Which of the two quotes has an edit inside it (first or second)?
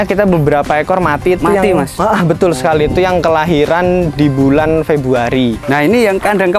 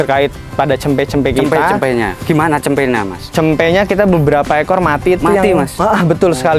first